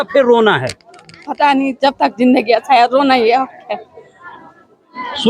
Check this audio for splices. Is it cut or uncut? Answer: uncut